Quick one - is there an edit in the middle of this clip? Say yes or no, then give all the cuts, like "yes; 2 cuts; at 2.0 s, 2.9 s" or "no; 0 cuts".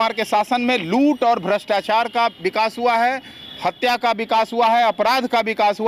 no; 0 cuts